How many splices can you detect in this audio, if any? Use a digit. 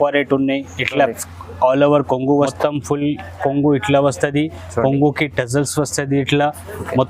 1